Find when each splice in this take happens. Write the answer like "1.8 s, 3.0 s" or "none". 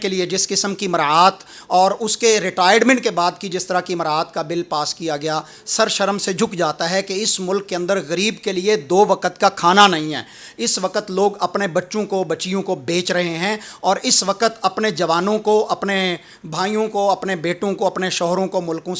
none